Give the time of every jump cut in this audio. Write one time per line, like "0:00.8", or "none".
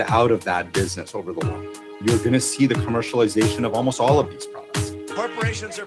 0:04.2